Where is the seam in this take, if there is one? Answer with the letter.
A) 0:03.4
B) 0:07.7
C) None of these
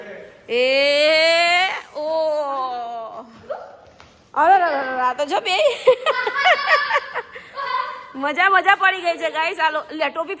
C